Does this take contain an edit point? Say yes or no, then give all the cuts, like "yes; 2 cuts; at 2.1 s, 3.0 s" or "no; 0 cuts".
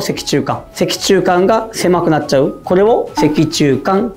no; 0 cuts